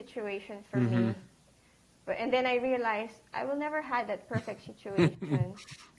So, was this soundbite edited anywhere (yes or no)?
no